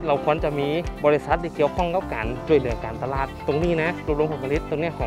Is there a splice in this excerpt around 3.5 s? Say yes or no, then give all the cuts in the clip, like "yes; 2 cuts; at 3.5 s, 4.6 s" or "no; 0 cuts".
no; 1 cut; at 0.9 s